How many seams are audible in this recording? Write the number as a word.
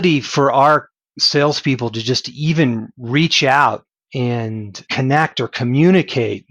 zero